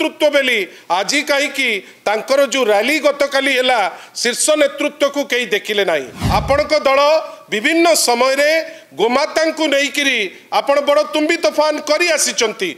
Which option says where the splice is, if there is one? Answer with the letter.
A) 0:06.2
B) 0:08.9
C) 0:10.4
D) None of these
A